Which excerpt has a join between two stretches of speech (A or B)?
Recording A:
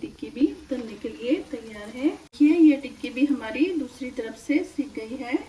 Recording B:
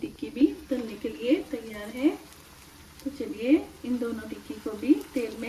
A